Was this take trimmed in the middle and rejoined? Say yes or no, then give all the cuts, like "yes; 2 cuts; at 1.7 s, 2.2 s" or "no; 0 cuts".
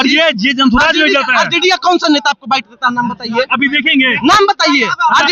no; 0 cuts